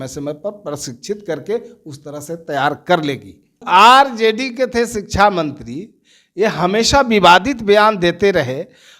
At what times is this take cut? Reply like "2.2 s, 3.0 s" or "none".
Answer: 3.5 s